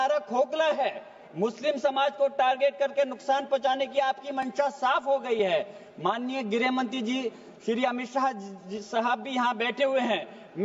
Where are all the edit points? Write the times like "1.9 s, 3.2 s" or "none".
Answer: none